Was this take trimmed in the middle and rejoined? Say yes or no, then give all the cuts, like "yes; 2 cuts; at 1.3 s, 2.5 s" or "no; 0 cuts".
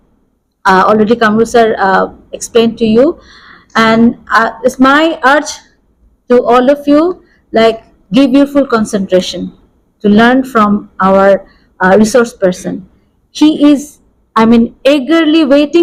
no; 0 cuts